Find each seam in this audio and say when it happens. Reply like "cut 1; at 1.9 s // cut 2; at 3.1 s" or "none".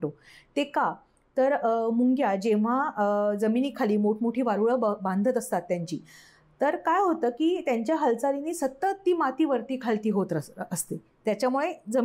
none